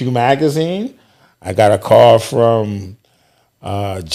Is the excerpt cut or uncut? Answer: uncut